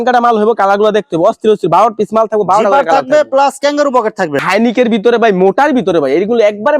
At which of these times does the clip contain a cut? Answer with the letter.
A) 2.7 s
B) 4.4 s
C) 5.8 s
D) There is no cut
B